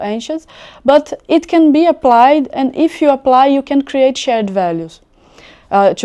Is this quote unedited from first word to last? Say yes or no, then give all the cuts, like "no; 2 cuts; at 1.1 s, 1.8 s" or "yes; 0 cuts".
yes; 0 cuts